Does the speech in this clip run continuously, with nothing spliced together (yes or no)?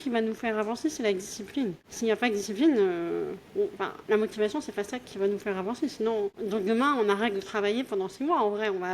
no